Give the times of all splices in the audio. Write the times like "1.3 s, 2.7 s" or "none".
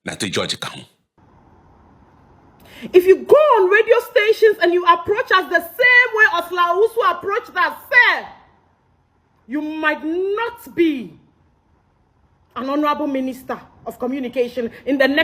1.2 s